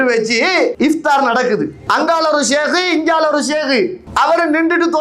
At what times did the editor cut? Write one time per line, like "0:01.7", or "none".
0:00.7
0:01.8
0:04.0

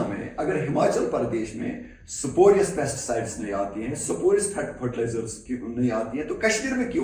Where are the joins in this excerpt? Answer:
none

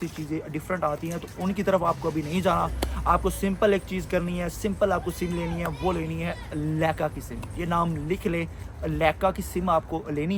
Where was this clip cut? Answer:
none

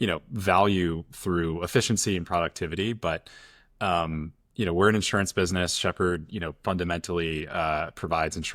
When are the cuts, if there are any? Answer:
none

